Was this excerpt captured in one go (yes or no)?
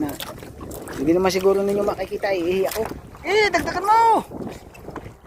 no